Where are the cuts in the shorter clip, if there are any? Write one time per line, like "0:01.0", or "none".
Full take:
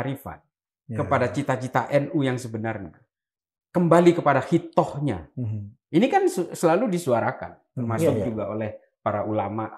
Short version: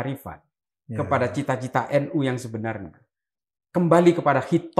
none